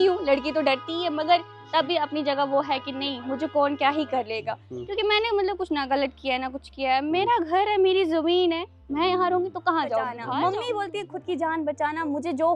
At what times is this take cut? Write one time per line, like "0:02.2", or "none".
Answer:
0:10.2